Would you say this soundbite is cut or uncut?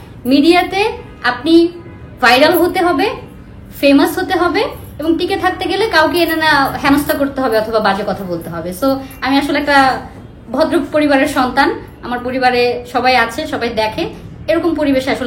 uncut